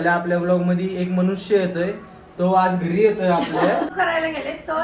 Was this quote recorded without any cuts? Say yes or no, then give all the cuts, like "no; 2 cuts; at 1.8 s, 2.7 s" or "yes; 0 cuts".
no; 1 cut; at 3.9 s